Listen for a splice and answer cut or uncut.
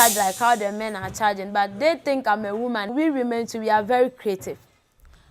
cut